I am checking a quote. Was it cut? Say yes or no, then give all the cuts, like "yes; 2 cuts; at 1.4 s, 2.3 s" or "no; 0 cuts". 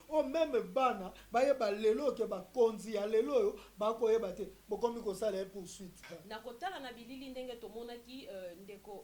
yes; 1 cut; at 6.0 s